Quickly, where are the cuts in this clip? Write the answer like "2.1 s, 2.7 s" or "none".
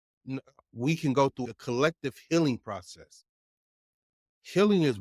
1.5 s

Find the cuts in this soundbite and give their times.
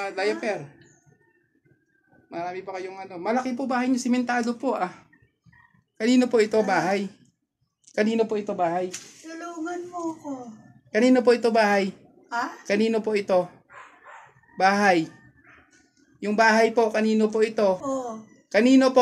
17.8 s

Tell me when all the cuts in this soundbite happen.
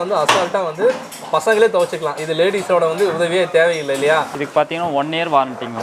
4.3 s

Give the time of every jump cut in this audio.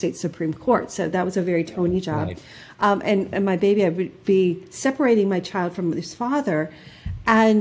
none

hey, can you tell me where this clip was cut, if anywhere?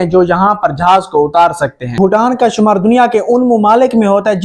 1.9 s

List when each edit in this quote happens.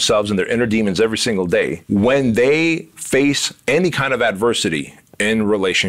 1.8 s

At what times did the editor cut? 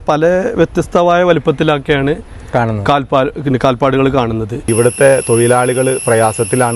4.5 s

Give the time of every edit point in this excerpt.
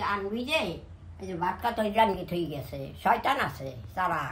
none

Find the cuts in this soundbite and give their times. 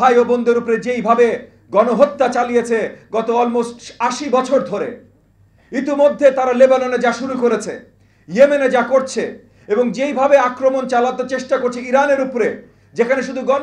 none

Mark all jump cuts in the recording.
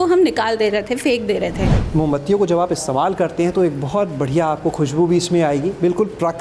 1.8 s

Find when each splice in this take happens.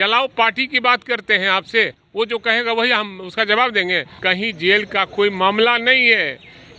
4.1 s

